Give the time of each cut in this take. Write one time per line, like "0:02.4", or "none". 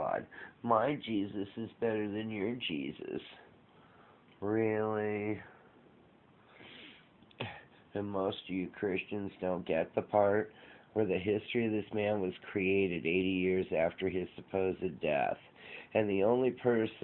none